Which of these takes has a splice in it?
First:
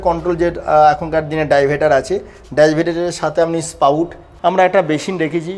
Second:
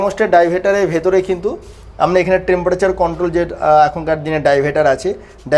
first; 1 cut; at 4.2 s

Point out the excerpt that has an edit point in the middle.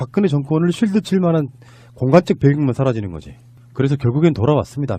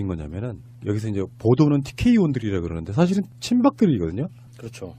second; 1 cut; at 2.0 s

